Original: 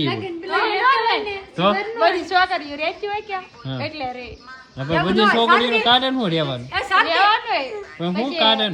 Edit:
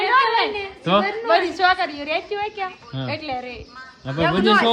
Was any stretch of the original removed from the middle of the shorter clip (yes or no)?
no